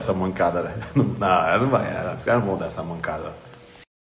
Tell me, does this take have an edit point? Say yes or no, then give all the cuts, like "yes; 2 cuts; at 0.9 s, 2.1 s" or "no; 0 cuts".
no; 0 cuts